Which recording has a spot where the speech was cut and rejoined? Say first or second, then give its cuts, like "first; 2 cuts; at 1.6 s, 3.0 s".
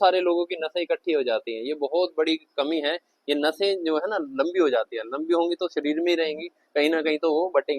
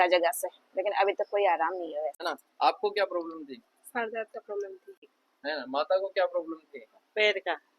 second; 2 cuts; at 2.2 s, 4.9 s